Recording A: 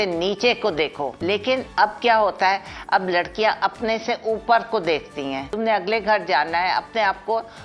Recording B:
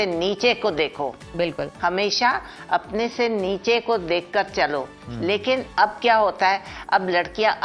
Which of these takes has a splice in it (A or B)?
A